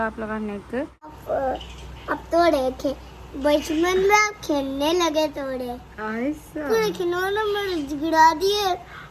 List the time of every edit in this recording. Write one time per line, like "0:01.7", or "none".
0:01.2

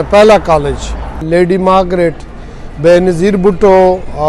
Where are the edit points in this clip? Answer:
0:01.2

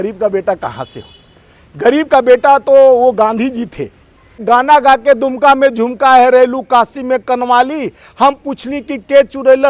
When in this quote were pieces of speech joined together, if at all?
0:04.4

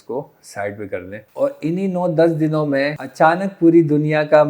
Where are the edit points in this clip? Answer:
0:01.2
0:03.0

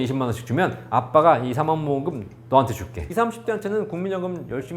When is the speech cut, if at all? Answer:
0:03.0

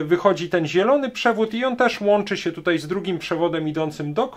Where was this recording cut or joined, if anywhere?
none

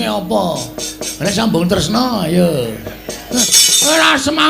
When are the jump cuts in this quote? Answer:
0:03.4

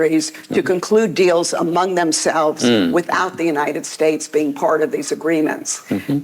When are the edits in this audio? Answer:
none

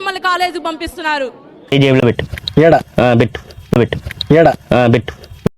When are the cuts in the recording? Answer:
0:01.7

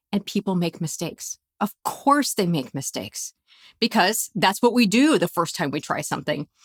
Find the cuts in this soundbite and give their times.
none

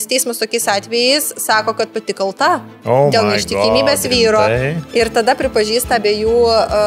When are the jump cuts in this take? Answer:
none

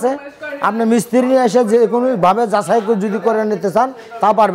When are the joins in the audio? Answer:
none

